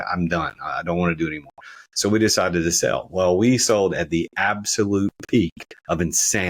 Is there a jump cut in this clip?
no; 0 cuts

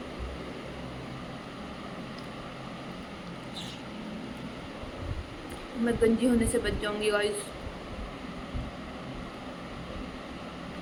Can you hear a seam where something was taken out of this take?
no; 0 cuts

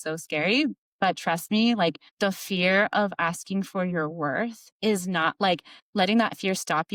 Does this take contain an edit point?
no; 0 cuts

